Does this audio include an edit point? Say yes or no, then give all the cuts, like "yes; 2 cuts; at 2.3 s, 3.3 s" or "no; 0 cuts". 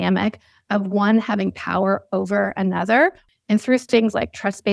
yes; 1 cut; at 3.2 s